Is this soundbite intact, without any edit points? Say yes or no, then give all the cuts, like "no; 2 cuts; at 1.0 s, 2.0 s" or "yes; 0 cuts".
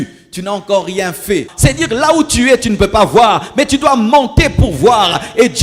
no; 1 cut; at 1.5 s